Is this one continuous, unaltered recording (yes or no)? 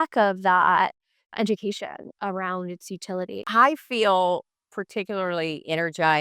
no